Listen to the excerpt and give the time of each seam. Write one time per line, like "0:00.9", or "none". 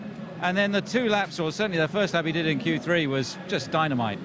0:02.5